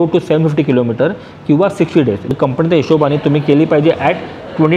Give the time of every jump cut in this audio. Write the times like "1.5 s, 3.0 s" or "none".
2.3 s